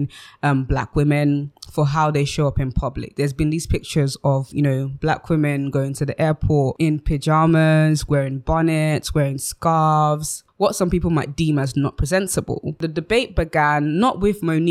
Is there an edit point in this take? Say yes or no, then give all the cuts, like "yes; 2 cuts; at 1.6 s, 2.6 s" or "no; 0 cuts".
no; 0 cuts